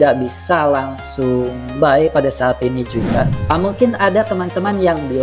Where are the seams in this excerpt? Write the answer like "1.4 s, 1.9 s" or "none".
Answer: 3.3 s